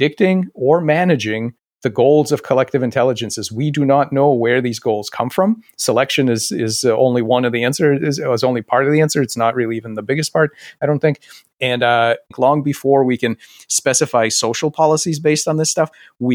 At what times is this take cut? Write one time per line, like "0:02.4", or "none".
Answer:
0:12.3